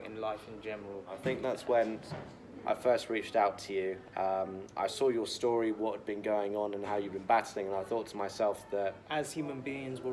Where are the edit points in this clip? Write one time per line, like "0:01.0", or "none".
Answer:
0:01.2
0:09.0